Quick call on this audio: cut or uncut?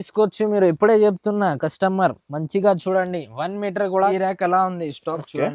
cut